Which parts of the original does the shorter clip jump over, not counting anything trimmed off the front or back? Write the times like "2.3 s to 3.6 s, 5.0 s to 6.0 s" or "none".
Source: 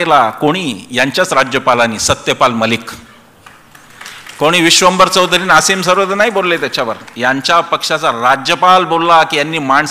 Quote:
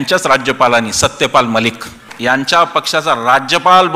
3.2 s to 7.1 s